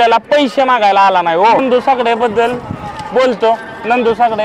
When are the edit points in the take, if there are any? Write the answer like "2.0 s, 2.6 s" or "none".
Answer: 1.6 s